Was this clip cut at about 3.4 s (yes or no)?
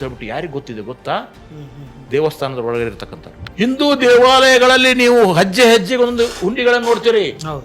yes